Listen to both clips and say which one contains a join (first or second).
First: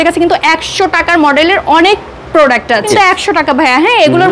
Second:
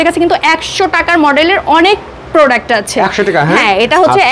first